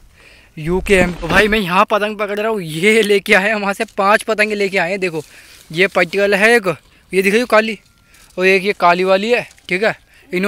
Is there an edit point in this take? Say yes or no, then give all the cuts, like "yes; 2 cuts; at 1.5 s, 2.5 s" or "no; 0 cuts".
yes; 1 cut; at 1.1 s